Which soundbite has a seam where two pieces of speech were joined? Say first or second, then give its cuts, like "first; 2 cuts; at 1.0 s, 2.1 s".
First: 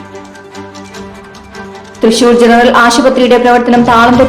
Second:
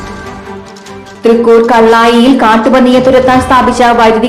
second; 1 cut; at 1.0 s